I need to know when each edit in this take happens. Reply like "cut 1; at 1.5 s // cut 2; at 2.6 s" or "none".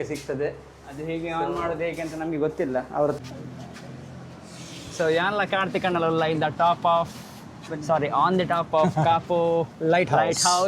cut 1; at 3.2 s